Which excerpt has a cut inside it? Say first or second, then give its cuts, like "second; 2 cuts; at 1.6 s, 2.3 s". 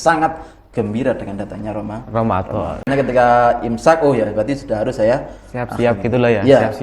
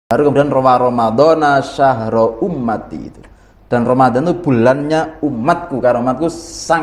first; 1 cut; at 2.9 s